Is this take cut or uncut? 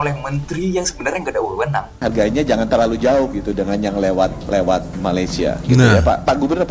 cut